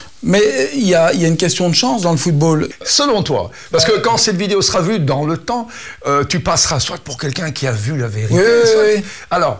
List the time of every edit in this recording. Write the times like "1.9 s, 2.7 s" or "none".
2.7 s